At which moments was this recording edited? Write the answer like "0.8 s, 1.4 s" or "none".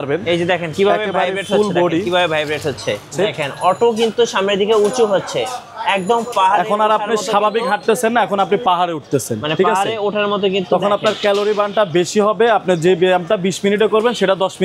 3.1 s